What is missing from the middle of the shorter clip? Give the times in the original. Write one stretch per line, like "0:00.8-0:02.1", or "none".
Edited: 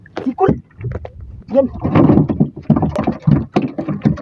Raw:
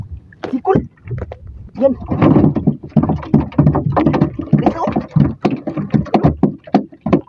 0:03.2-0:04.8